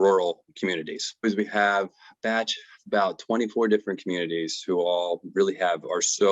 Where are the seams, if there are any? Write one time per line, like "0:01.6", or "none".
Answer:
0:01.2